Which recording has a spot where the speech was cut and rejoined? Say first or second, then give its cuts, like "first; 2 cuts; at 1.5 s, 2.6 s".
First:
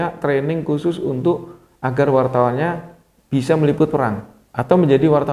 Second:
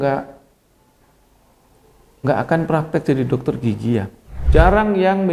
second; 1 cut; at 4.4 s